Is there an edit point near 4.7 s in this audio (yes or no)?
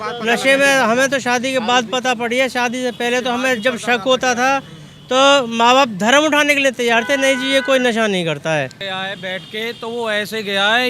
no